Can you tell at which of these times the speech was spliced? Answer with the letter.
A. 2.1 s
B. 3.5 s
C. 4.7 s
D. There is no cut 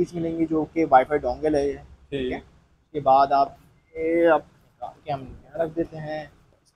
D